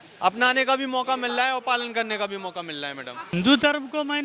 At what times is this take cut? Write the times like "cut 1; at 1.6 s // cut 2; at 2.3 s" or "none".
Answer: cut 1; at 3.3 s

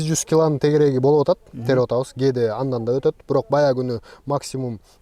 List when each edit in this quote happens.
none

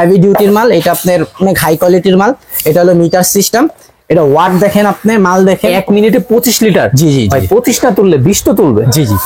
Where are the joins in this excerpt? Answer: none

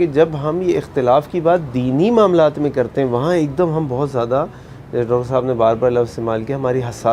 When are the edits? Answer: none

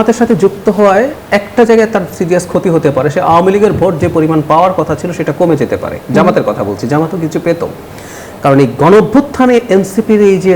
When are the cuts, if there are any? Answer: cut 1; at 1.2 s

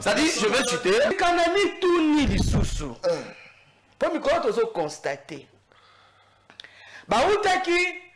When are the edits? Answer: cut 1; at 1.1 s

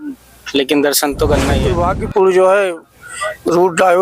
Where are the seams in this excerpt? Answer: cut 1; at 1.7 s

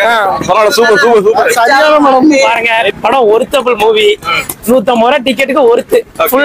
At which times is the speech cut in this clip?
cut 1; at 2.5 s

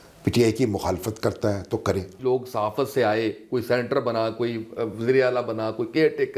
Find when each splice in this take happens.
cut 1; at 2.1 s

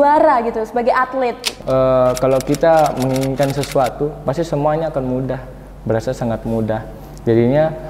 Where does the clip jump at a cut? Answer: cut 1; at 1.5 s

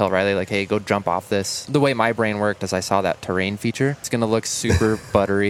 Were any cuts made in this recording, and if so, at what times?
cut 1; at 1.6 s // cut 2; at 4.1 s

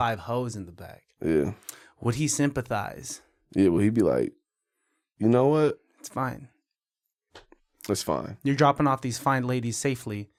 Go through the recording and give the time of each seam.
none

